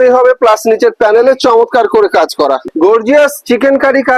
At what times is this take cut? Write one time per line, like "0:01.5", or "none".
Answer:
0:02.7